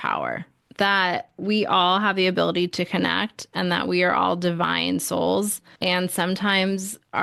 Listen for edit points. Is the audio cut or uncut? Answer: uncut